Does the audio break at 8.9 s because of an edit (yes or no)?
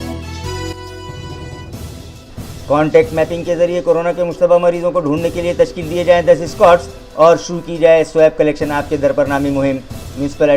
no